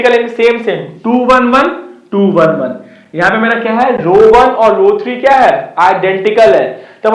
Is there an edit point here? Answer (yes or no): no